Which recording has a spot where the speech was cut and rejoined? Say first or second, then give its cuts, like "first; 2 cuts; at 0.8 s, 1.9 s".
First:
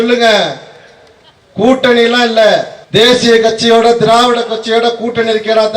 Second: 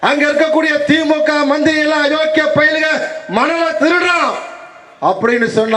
first; 1 cut; at 2.8 s